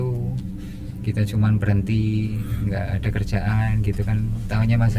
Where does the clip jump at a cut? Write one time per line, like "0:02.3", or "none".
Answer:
none

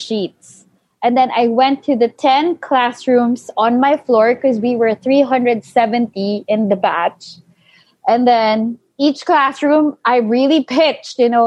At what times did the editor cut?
none

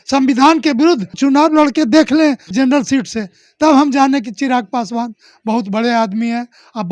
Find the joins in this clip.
0:01.2
0:02.5

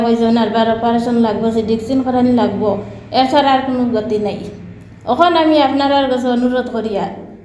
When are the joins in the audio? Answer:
none

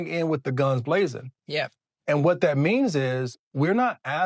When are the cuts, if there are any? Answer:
0:02.0

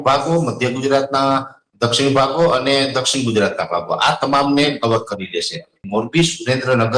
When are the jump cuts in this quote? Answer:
0:05.8

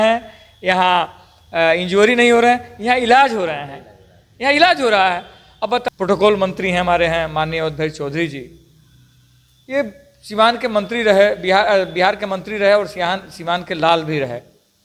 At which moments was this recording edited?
0:05.8

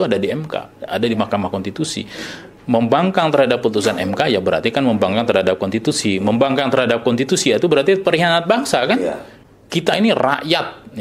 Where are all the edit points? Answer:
0:09.3

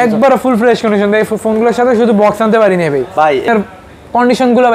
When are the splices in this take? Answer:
0:03.5

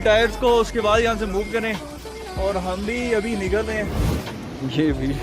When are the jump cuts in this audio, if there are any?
0:04.1

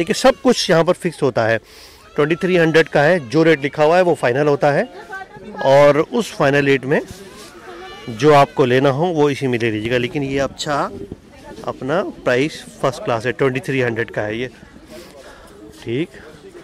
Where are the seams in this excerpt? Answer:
none

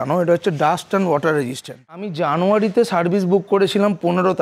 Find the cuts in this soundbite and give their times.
0:02.1

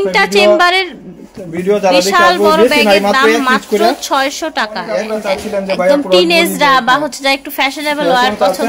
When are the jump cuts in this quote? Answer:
0:05.1

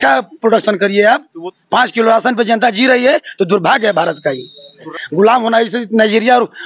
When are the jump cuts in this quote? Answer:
0:01.4
0:04.9

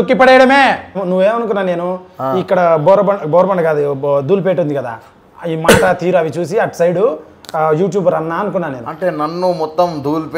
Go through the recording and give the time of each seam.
0:01.0

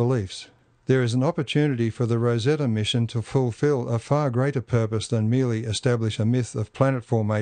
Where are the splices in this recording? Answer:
none

